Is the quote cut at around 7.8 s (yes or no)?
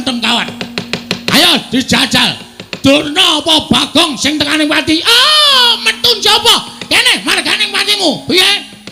no